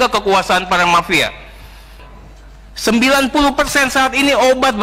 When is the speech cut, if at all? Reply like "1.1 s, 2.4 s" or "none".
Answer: 2.0 s